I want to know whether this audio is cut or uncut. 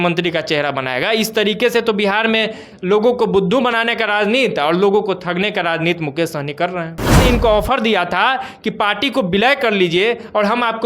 cut